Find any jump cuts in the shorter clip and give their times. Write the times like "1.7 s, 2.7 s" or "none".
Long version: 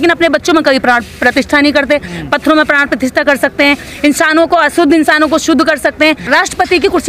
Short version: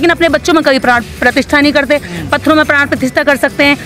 none